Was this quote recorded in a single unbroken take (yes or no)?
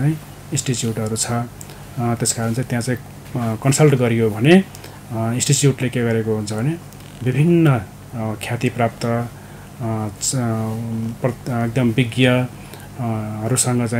yes